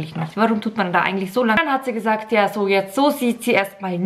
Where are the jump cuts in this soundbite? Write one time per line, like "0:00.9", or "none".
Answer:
0:01.6